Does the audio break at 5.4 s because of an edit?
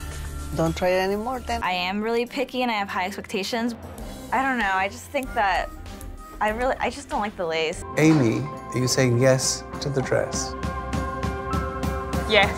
no; 2 cuts; at 1.6 s, 7.8 s

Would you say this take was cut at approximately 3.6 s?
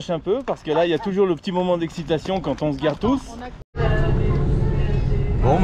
yes; 1 cut; at 3.6 s

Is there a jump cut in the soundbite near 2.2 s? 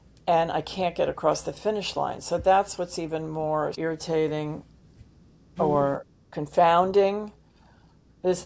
no; 0 cuts

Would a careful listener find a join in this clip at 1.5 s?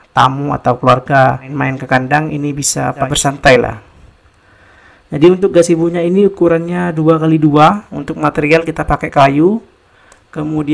yes; 2 cuts; at 1.5 s, 3.1 s

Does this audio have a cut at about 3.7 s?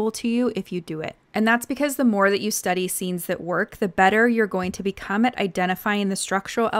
no; 1 cut; at 1.1 s

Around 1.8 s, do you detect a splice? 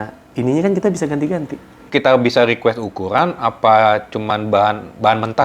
yes; 1 cut; at 1.8 s

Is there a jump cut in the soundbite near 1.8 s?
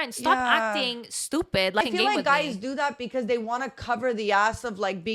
yes; 1 cut; at 1.8 s

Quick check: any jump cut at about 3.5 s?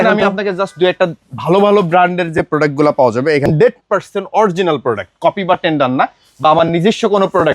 yes; 1 cut; at 3.5 s

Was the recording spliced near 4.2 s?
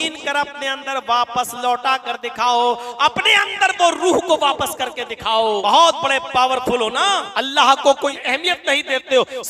no; 3 cuts; at 5.6 s, 7.3 s, 8.2 s

